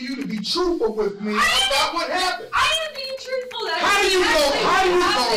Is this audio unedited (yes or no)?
yes